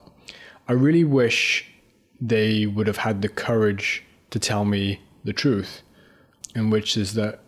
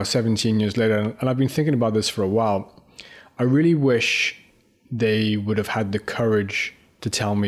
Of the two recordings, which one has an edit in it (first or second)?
first